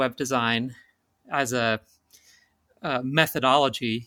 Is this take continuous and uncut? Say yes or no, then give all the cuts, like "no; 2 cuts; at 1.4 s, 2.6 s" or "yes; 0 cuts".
yes; 0 cuts